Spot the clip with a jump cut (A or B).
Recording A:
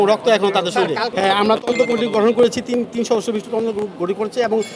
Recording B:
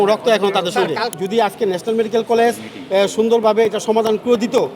B